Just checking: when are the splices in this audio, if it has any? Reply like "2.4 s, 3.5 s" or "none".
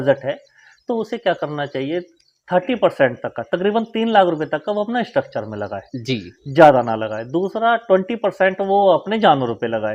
none